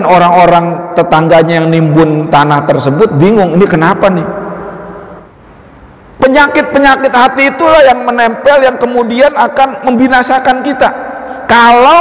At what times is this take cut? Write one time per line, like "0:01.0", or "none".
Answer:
0:05.3